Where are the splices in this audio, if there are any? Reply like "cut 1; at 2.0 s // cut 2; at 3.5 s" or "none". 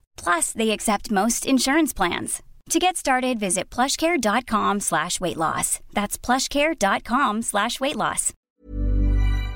cut 1; at 8.5 s